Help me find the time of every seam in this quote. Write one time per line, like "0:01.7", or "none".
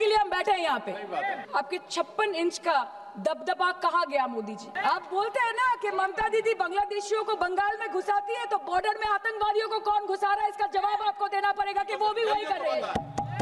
0:01.4
0:04.7

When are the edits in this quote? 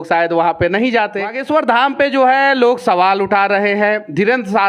0:01.4

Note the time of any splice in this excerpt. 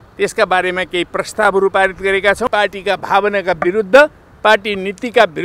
0:02.5

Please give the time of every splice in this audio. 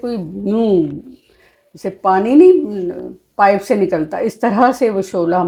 none

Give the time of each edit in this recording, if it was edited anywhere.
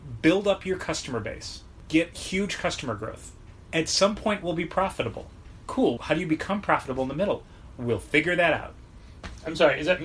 0:01.7
0:06.0

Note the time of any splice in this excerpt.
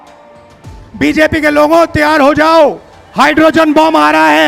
none

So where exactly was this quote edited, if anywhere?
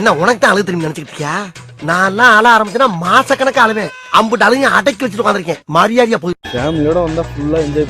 0:06.5

